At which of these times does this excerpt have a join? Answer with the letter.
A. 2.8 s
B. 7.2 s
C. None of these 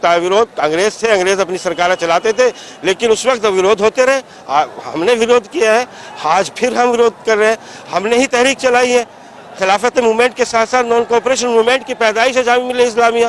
C